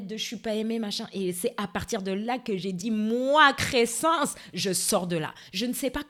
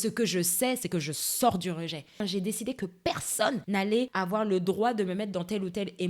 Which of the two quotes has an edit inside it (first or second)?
second